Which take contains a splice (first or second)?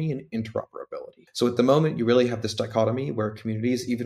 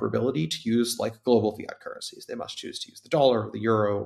first